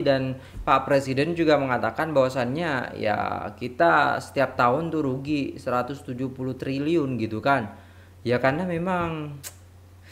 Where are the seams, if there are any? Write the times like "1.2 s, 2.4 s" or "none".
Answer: none